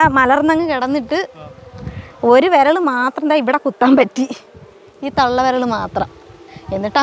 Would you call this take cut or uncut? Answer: uncut